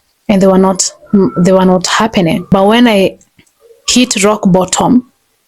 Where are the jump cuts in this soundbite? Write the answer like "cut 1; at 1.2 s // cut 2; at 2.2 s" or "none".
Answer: cut 1; at 2.5 s

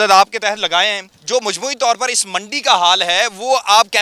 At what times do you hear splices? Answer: cut 1; at 1.1 s

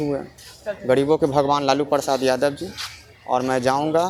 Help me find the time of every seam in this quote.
none

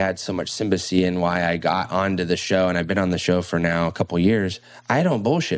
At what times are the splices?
none

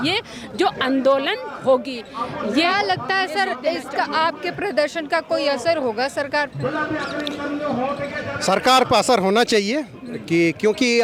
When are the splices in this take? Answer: none

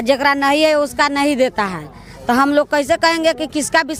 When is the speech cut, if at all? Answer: none

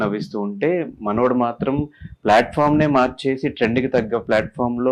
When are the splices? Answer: none

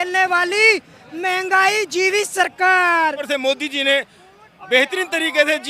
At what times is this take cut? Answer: cut 1; at 3.2 s

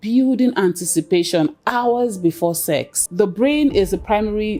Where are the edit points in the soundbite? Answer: cut 1; at 3.0 s

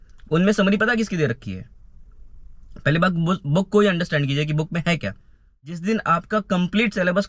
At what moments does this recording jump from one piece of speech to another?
cut 1; at 5.8 s

